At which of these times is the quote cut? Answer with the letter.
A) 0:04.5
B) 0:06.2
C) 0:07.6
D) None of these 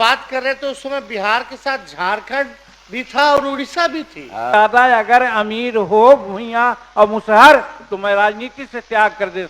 A